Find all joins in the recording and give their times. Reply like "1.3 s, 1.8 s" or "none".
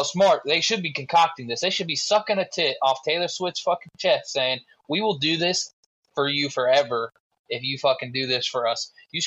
none